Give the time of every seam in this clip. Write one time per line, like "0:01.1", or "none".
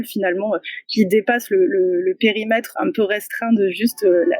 0:02.7